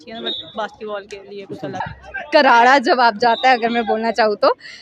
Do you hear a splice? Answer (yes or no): yes